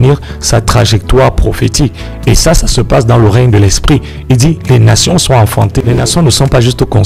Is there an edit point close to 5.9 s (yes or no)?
yes